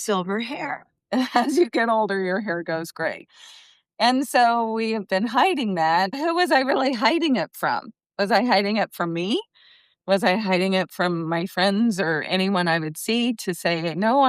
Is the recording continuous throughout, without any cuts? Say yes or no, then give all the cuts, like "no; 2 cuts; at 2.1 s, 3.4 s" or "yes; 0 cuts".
no; 1 cut; at 6.2 s